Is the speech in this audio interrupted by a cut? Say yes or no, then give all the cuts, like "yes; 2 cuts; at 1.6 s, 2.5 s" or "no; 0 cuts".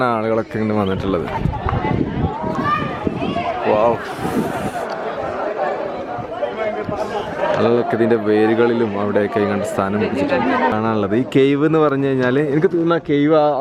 yes; 1 cut; at 10.7 s